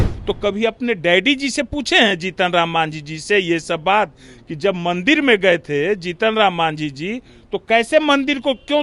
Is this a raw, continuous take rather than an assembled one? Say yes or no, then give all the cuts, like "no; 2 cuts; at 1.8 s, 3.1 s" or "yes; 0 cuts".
yes; 0 cuts